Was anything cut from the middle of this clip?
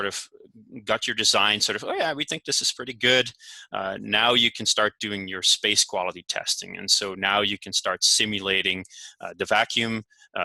no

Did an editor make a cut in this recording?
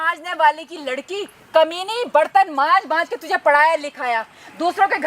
no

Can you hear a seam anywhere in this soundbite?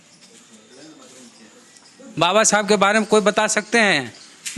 yes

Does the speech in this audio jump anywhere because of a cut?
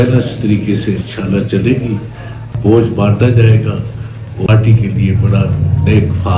yes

